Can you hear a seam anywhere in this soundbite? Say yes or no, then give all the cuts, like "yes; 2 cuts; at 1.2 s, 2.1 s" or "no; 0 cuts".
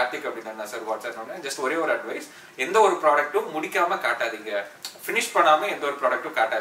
no; 0 cuts